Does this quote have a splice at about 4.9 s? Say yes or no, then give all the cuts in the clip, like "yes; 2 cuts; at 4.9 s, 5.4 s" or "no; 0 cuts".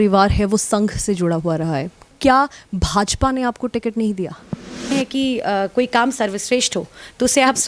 yes; 2 cuts; at 2.1 s, 4.9 s